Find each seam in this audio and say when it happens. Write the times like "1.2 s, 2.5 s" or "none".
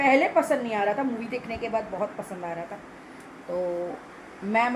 none